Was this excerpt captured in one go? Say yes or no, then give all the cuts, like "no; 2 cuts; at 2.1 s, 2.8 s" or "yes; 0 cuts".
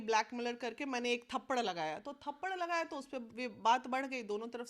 yes; 0 cuts